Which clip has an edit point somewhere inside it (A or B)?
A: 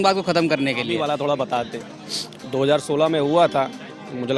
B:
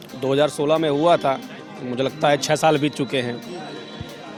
A